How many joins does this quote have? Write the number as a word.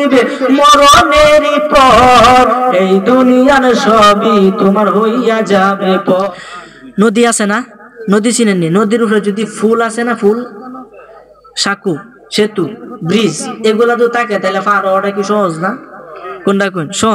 one